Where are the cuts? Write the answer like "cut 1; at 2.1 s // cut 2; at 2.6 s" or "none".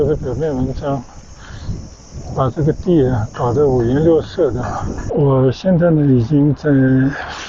cut 1; at 5.0 s